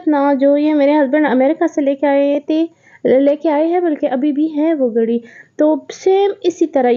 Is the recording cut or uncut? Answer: uncut